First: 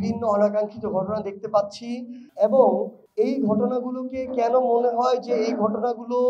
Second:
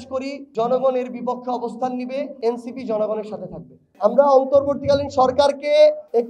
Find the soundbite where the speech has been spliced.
second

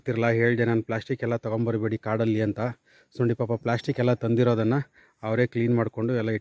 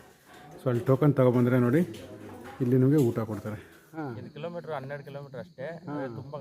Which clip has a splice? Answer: second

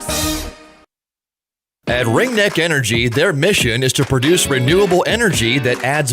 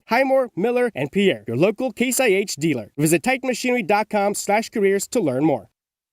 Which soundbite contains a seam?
first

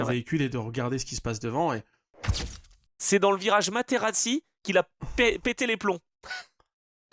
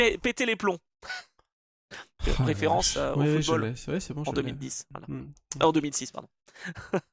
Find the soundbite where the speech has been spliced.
first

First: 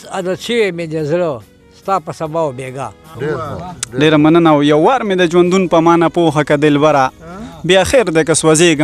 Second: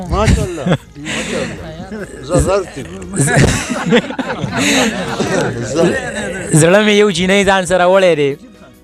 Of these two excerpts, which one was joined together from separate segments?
first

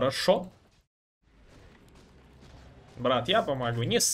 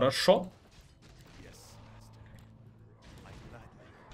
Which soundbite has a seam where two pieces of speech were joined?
first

